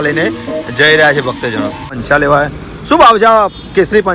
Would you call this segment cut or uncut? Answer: cut